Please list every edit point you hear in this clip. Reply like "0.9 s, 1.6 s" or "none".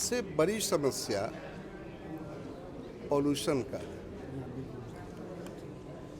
none